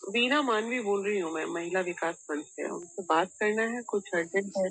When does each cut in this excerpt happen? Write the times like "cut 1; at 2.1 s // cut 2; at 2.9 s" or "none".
none